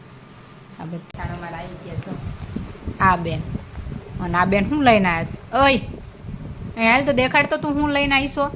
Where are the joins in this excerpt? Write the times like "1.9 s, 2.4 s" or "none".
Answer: 1.1 s